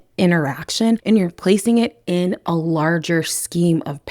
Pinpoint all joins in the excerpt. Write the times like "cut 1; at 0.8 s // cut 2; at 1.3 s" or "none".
cut 1; at 1.0 s